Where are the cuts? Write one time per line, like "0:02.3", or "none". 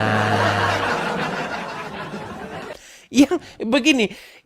0:02.6